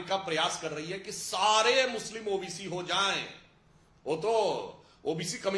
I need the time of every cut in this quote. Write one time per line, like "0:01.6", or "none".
none